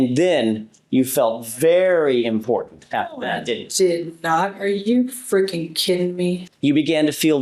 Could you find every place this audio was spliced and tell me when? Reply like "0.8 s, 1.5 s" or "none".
6.4 s